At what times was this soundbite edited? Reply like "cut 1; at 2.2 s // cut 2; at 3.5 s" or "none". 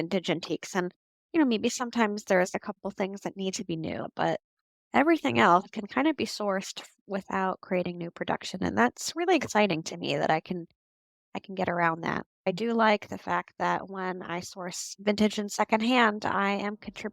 cut 1; at 4.1 s // cut 2; at 12.5 s